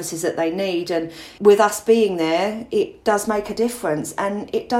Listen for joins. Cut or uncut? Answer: cut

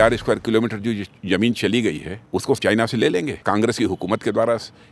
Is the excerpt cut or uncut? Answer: cut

